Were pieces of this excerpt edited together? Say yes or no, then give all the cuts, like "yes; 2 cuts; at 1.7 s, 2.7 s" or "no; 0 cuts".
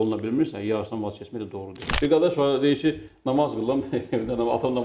yes; 1 cut; at 1.9 s